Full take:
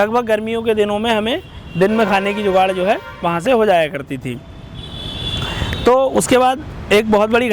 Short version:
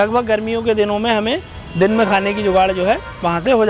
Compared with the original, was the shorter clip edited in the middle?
no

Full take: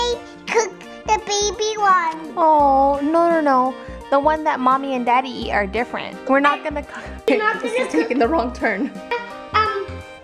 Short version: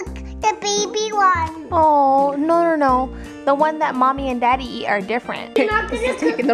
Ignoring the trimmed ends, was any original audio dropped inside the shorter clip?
yes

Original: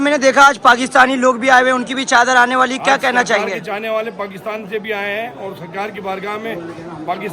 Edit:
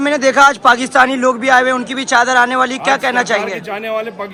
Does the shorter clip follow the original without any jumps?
yes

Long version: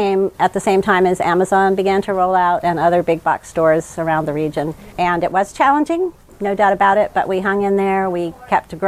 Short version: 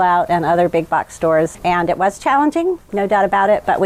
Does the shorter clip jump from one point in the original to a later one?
yes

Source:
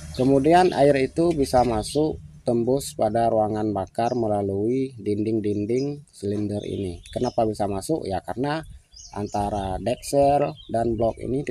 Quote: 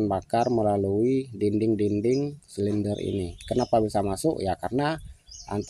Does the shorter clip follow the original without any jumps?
yes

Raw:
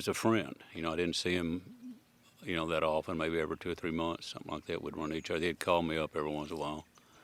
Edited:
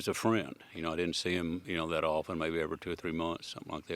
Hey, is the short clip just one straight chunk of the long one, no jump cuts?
no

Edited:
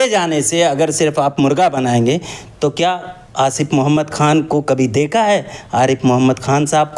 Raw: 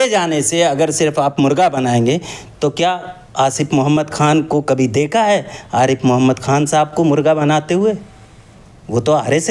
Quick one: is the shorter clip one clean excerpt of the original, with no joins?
yes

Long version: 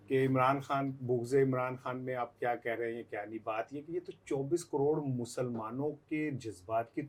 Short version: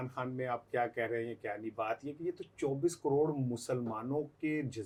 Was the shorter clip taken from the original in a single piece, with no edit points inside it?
yes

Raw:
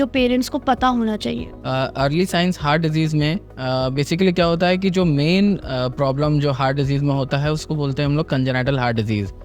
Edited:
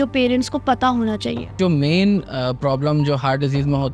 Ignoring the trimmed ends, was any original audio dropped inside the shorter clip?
yes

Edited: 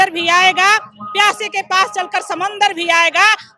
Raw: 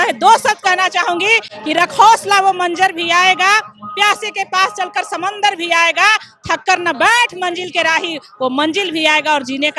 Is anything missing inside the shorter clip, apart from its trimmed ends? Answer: no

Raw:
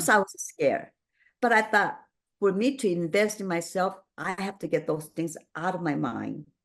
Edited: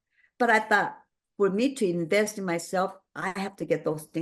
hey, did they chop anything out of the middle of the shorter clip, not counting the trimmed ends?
no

